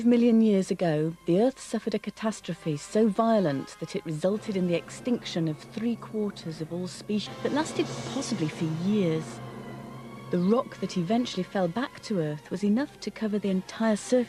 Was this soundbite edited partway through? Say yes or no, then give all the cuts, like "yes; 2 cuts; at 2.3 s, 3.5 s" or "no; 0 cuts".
no; 0 cuts